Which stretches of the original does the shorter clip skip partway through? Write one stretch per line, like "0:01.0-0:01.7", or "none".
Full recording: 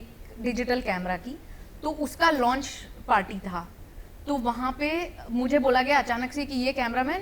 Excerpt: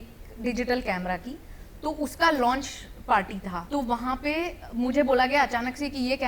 0:03.6-0:04.1